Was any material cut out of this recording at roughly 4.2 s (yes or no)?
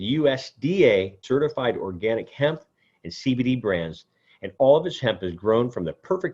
no